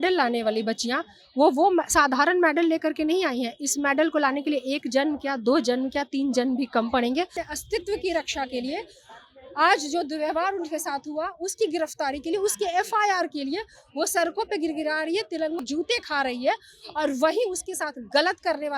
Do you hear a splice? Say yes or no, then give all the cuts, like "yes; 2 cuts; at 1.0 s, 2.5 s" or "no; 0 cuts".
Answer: yes; 1 cut; at 7.4 s